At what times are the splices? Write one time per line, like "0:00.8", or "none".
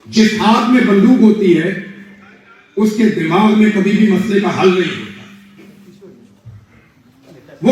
none